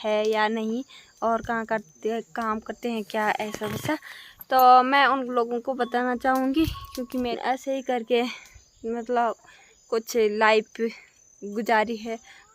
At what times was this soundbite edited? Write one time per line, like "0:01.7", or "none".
0:07.3